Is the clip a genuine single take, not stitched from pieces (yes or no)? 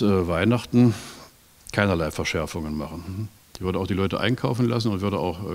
yes